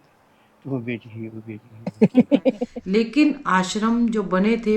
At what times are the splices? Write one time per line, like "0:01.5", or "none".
0:02.7